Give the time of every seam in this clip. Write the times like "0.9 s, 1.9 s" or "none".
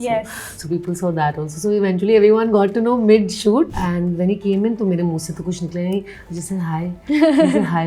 3.8 s